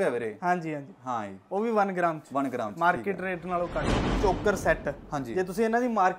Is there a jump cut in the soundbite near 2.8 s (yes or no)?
no